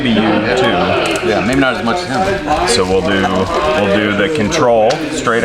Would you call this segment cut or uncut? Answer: uncut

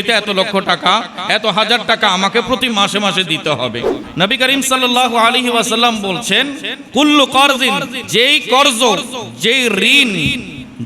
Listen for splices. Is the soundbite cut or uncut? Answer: cut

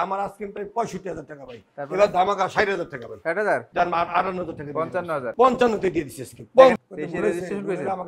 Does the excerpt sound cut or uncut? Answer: cut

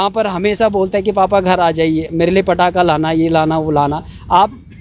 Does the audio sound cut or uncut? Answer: uncut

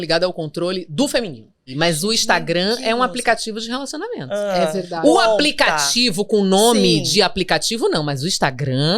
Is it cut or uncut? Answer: cut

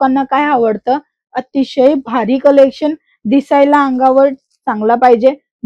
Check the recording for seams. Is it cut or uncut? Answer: uncut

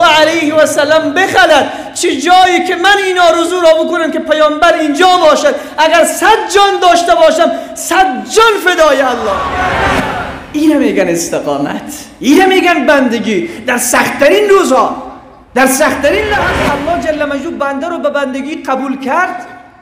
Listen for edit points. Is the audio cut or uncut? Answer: cut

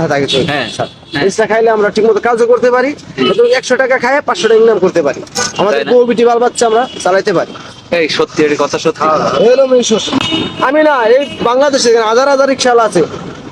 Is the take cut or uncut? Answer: cut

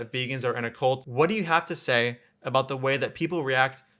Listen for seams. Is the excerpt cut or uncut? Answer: cut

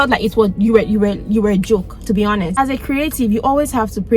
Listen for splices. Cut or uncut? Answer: cut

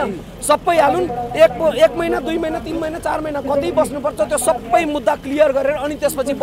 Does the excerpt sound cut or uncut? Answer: uncut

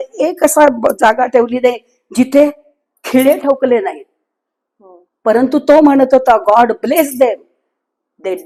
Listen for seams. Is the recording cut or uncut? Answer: uncut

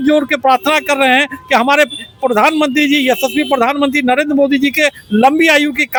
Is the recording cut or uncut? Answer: uncut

